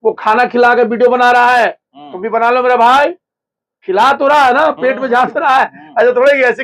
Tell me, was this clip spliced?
no; 0 cuts

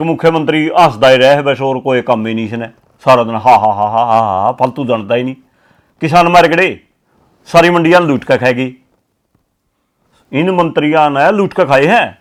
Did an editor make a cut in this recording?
no; 0 cuts

